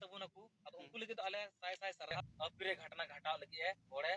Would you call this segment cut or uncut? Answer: cut